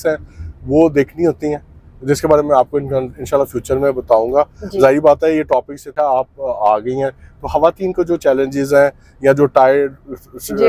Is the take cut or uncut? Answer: cut